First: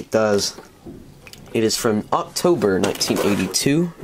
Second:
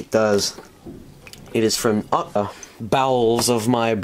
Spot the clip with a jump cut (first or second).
first